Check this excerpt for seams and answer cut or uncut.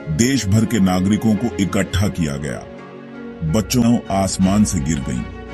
cut